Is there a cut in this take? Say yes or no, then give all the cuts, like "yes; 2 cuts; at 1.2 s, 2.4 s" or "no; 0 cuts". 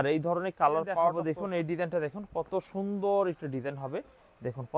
yes; 1 cut; at 1.2 s